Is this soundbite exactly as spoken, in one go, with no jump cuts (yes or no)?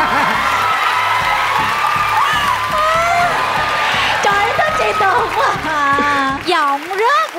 no